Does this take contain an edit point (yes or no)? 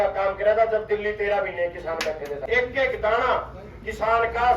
yes